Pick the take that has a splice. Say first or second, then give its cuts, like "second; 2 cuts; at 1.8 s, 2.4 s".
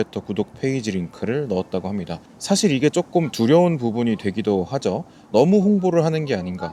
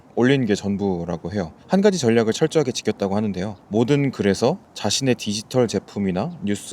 second; 3 cuts; at 1.5 s, 3.5 s, 4.7 s